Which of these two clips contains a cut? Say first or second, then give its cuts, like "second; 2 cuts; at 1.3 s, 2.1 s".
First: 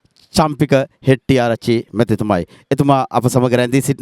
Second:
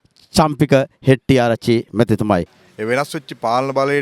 second; 1 cut; at 2.5 s